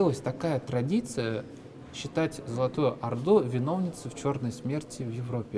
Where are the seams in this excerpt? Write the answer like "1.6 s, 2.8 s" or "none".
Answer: none